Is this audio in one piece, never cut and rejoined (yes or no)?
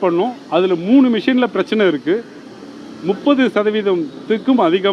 yes